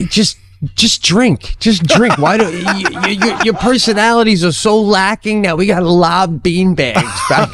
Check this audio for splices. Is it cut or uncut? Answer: uncut